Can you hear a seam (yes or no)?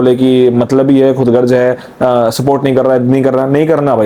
no